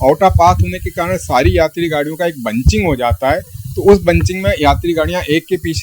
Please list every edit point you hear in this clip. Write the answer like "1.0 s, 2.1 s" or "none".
none